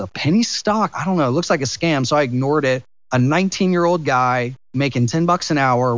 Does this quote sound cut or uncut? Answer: cut